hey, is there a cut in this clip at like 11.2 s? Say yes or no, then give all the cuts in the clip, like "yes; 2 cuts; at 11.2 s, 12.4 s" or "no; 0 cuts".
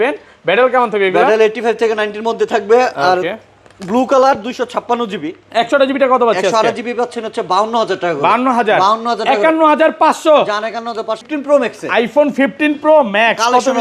yes; 1 cut; at 11.2 s